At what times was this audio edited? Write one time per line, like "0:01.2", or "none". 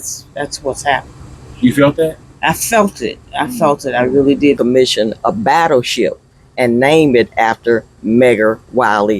0:04.8